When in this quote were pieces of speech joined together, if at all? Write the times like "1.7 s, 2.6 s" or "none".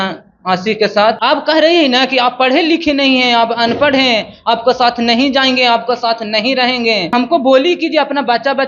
1.2 s, 7.1 s